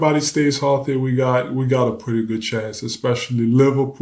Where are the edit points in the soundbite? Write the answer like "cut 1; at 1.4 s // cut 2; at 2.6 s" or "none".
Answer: none